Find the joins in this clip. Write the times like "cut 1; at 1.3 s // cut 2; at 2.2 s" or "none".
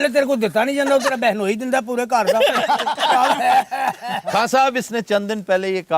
none